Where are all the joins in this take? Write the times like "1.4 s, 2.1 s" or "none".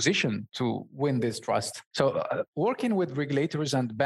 1.8 s